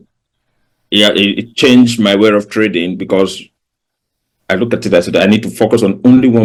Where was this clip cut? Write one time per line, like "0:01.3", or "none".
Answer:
none